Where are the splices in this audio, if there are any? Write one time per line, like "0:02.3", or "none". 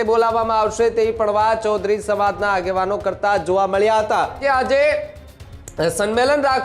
0:04.4